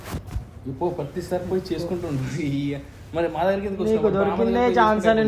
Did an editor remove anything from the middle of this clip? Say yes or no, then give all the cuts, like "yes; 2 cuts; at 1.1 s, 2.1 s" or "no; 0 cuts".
no; 0 cuts